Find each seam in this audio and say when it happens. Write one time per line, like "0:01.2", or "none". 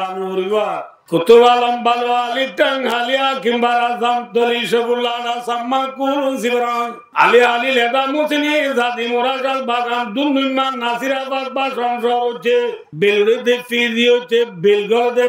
0:00.9
0:07.0
0:12.8